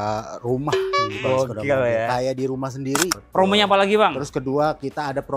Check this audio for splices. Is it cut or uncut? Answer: cut